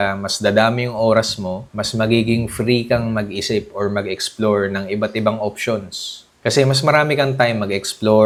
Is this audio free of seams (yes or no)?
yes